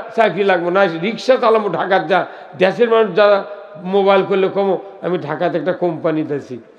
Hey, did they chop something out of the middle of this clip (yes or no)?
no